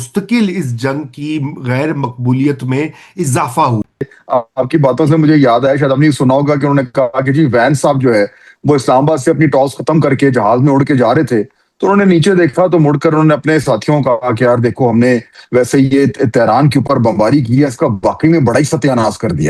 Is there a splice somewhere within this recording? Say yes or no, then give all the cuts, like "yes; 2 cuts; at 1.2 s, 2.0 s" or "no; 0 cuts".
yes; 1 cut; at 3.9 s